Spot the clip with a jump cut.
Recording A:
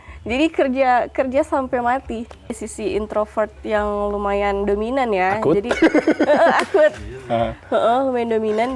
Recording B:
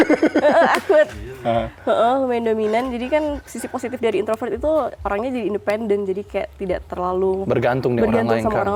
A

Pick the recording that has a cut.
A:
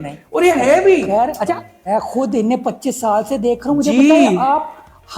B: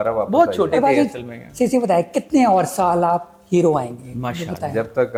A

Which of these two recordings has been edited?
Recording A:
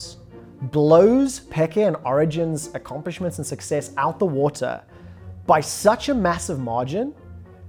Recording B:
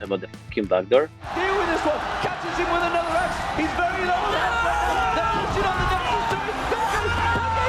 B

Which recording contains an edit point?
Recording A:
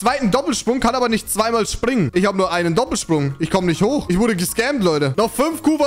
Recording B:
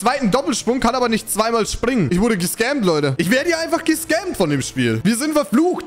B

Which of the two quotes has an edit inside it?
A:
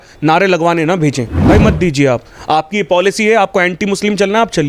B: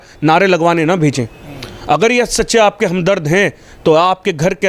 A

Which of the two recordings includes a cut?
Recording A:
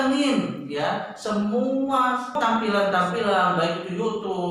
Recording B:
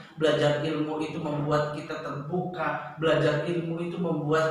A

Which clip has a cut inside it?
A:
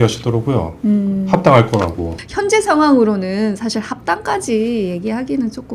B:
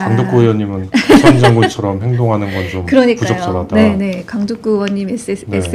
A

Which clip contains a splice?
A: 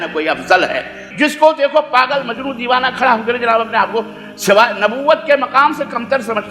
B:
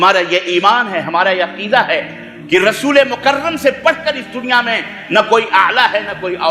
A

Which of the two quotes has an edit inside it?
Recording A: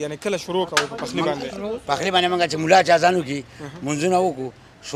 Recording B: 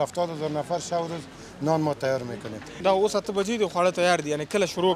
B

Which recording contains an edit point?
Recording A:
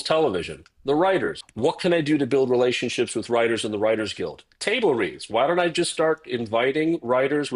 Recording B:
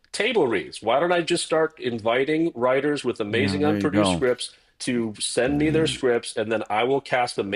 A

